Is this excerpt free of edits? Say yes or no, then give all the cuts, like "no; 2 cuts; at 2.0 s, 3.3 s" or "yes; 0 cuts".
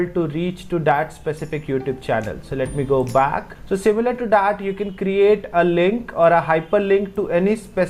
yes; 0 cuts